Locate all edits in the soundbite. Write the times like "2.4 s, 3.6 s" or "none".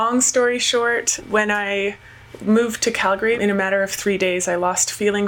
1.1 s, 3.4 s